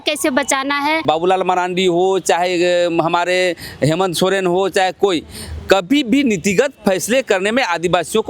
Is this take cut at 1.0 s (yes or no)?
yes